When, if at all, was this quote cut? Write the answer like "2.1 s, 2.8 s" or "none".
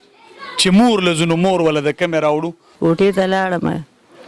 2.6 s

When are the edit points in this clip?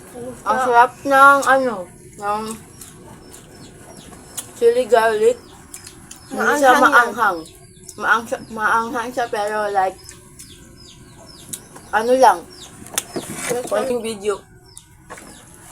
13.9 s

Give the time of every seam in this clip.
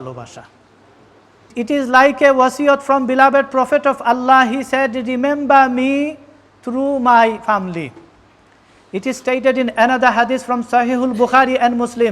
1.5 s

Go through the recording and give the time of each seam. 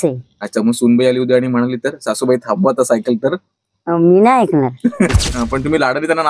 5.1 s

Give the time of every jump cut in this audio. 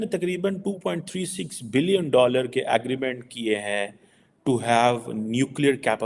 none

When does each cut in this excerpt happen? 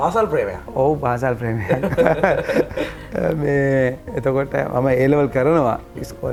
none

